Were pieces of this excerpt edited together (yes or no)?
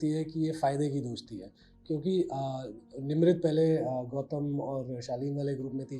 no